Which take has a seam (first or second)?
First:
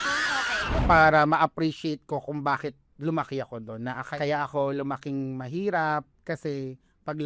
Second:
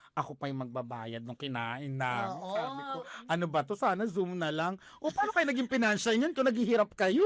first